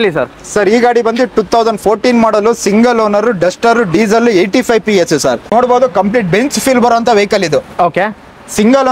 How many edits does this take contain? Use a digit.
1